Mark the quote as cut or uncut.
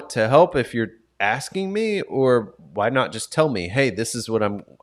uncut